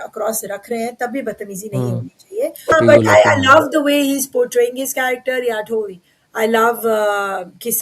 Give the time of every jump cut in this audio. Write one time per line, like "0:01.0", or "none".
0:02.7